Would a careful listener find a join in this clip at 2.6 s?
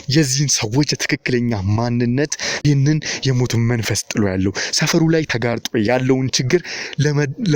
yes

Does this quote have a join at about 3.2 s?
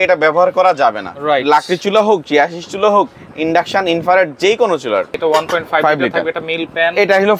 no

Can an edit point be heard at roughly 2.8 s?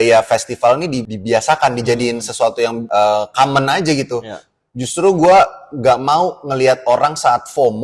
yes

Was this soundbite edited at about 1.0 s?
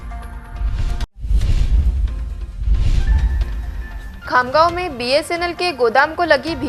yes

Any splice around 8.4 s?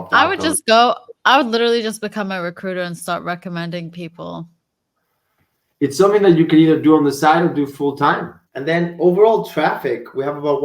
yes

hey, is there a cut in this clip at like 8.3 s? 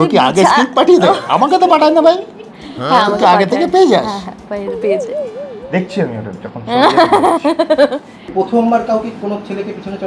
yes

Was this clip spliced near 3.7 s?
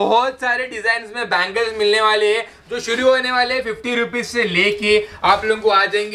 no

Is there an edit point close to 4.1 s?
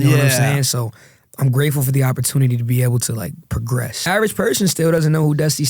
yes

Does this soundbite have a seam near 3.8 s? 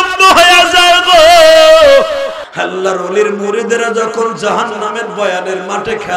no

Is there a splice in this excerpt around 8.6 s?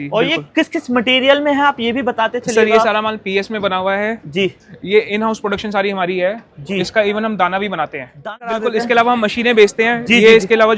yes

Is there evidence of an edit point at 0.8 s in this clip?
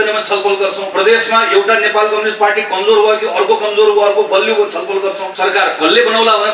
yes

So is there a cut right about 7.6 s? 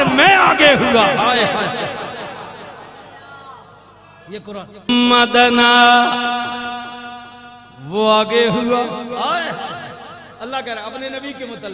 no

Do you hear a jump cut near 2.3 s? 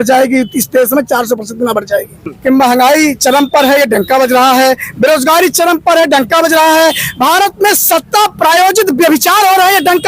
yes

